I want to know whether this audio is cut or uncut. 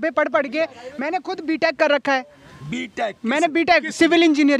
uncut